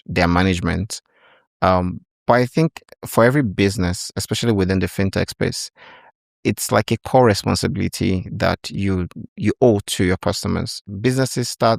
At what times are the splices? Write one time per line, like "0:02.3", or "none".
0:10.8